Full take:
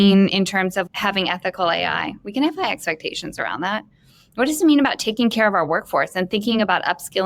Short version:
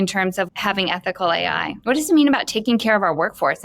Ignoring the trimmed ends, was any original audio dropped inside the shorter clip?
yes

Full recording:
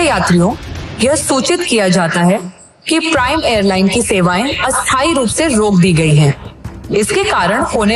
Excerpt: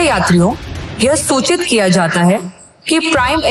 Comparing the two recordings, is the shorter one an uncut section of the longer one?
yes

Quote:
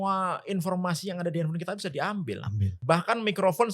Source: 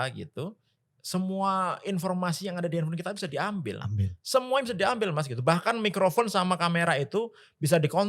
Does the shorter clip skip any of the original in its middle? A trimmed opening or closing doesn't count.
yes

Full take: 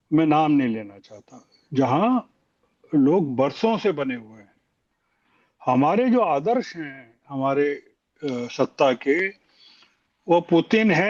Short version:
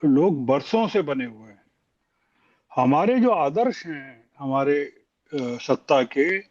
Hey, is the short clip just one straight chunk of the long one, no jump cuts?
yes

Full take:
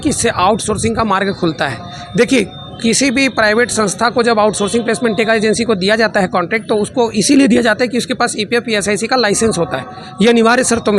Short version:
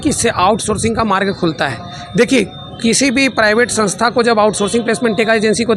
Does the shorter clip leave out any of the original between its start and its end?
no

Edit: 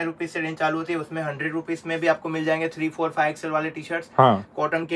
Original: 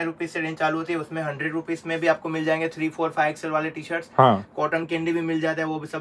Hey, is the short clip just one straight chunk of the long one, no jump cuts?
yes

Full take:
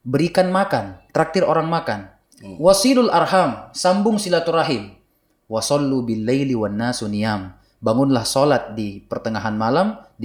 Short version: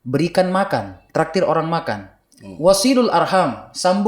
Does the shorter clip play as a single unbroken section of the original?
yes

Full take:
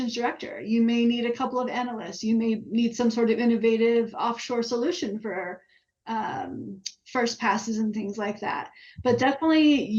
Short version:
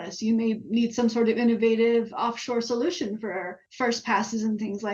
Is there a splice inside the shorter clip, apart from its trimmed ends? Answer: yes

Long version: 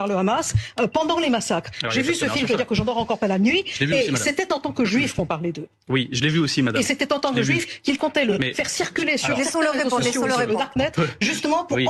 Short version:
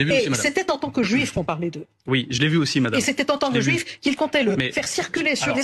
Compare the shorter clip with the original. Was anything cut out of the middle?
no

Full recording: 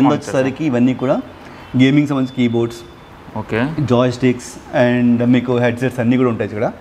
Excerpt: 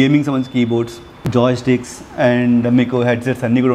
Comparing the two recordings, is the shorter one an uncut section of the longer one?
no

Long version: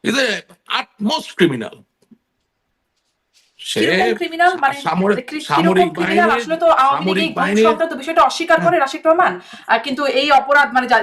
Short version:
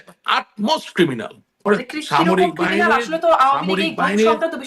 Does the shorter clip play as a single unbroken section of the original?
no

